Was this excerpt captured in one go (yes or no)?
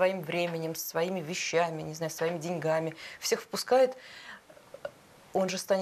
yes